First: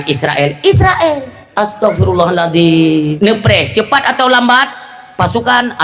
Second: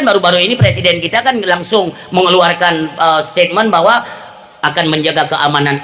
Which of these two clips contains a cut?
first; 2 cuts; at 1.4 s, 3.1 s

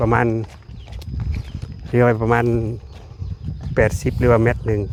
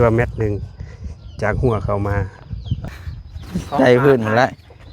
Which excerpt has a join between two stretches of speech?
second; 1 cut; at 2.8 s

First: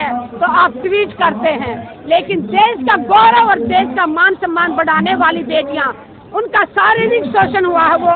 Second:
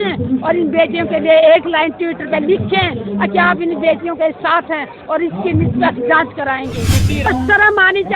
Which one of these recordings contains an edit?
second; 1 cut; at 7.3 s

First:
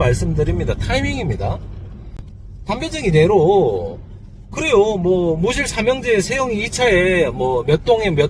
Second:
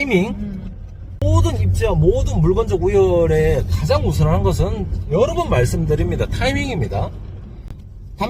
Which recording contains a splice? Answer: second; 1 cut; at 1.3 s

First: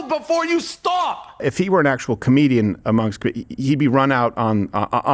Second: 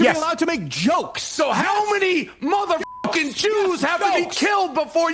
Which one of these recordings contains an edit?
first; 1 cut; at 1.4 s

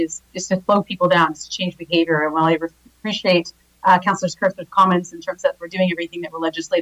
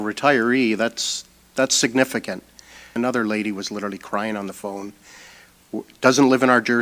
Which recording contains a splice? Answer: second; 1 cut; at 2.9 s

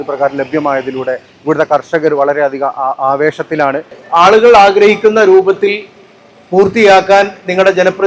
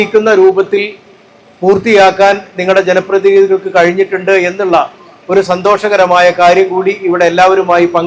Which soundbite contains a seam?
first; 1 cut; at 4.0 s

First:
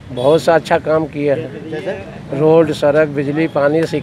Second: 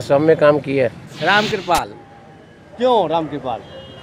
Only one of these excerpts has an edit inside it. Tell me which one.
second; 1 cut; at 1.1 s

